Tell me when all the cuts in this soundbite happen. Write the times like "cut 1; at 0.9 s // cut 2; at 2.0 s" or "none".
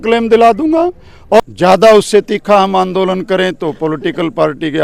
cut 1; at 1.4 s